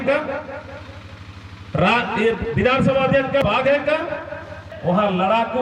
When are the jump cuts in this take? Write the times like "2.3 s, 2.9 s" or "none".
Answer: 3.4 s, 4.7 s